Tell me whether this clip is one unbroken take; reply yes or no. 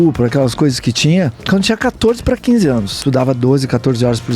no